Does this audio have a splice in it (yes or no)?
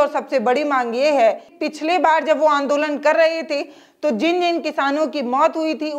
yes